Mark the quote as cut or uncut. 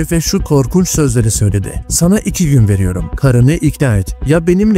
uncut